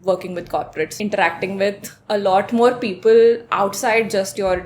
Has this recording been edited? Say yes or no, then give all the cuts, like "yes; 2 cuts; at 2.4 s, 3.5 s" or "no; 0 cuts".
yes; 1 cut; at 0.9 s